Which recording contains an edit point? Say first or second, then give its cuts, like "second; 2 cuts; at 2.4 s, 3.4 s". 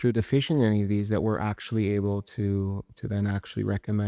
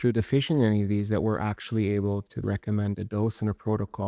second; 1 cut; at 2.4 s